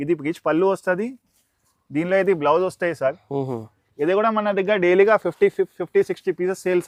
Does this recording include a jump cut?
no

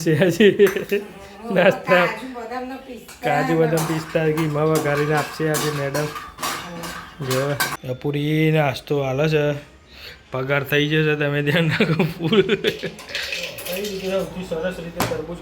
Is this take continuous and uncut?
no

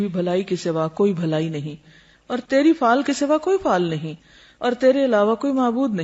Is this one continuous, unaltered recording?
yes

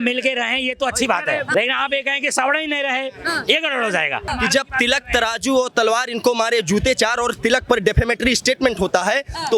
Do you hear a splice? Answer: yes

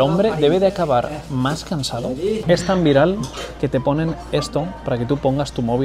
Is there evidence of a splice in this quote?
yes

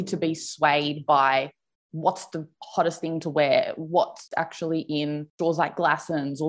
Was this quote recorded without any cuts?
yes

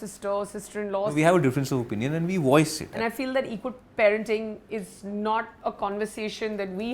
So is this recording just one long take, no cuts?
no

